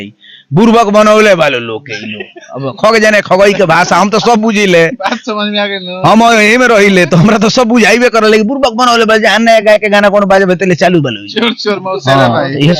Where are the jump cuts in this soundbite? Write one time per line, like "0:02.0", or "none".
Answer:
none